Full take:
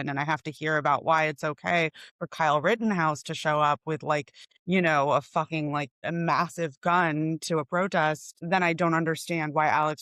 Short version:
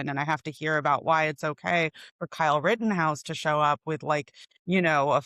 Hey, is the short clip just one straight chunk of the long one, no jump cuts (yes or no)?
yes